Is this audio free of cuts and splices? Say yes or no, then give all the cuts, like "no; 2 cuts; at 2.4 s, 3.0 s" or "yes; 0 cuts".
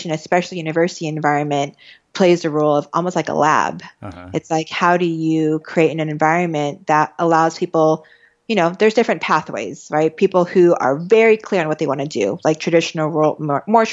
yes; 0 cuts